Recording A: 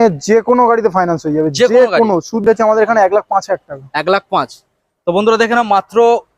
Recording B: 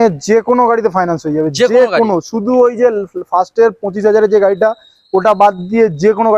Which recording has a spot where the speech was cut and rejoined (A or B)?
A